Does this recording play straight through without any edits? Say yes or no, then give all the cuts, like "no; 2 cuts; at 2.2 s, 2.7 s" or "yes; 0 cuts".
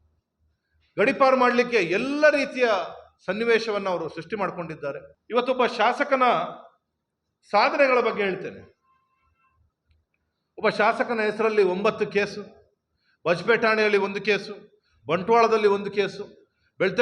no; 1 cut; at 5.1 s